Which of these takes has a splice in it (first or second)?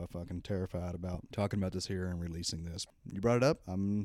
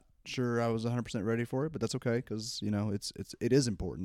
first